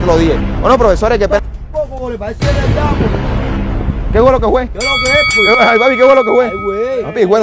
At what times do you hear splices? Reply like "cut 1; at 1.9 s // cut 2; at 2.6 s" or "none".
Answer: none